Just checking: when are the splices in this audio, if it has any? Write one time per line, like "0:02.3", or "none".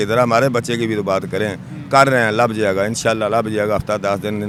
none